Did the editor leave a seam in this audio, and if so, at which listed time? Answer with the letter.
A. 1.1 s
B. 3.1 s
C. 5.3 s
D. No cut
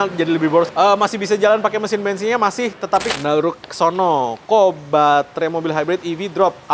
B